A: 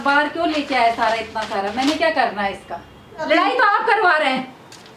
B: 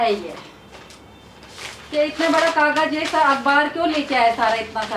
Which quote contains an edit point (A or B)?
A